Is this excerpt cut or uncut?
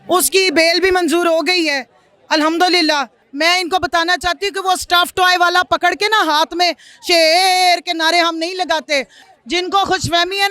cut